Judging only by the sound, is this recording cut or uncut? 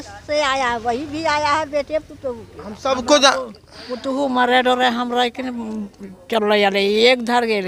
uncut